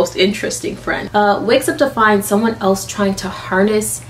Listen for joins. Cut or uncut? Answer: cut